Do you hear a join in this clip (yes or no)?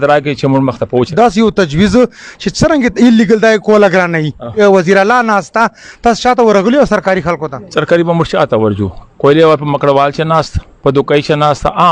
yes